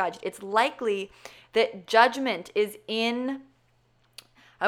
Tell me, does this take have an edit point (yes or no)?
no